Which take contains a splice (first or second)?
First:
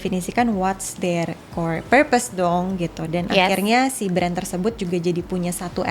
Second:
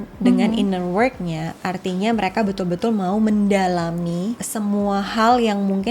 second